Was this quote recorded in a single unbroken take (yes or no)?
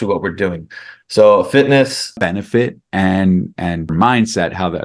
no